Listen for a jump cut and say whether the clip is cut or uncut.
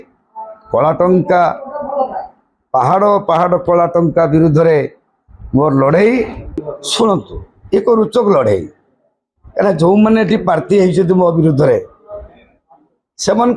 cut